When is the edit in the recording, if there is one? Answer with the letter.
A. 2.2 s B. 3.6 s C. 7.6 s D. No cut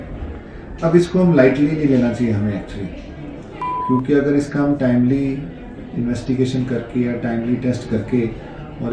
B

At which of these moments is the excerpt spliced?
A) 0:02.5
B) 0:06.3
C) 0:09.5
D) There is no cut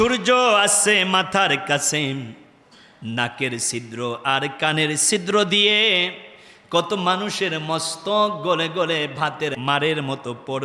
C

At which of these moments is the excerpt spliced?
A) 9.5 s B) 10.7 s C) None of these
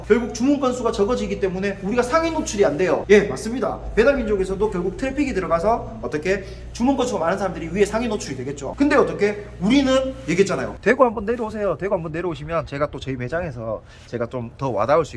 B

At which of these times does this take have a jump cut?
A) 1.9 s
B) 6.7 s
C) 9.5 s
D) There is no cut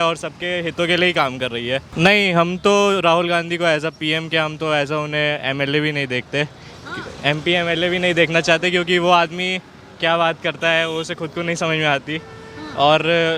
A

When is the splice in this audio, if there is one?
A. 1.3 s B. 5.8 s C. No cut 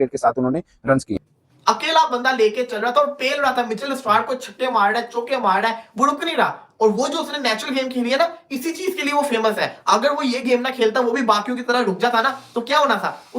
A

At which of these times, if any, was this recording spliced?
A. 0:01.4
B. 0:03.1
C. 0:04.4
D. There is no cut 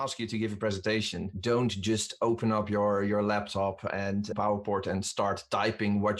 C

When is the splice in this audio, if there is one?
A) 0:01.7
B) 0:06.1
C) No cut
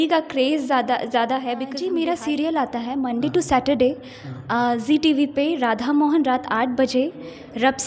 A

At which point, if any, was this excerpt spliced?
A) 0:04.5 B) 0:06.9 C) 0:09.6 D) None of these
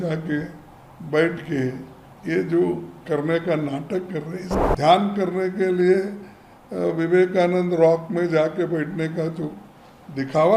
A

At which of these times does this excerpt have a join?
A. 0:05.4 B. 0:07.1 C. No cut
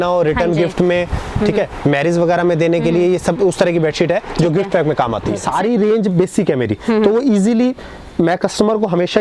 A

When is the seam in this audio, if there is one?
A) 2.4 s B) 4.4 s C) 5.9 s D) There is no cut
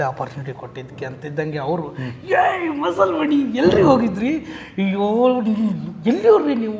D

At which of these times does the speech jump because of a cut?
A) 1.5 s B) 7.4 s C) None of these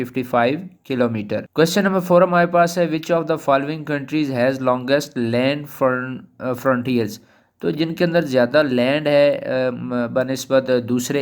A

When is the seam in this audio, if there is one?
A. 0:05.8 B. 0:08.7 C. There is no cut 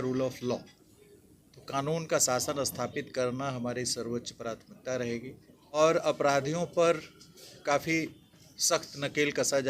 A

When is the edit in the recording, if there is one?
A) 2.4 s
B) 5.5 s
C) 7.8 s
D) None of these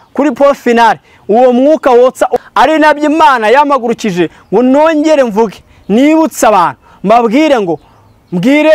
A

